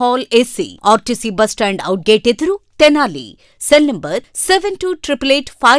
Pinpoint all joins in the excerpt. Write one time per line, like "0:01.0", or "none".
none